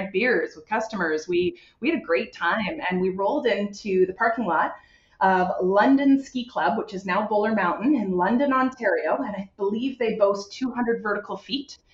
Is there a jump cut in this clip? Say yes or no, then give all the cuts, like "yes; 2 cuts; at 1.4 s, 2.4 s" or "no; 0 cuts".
no; 0 cuts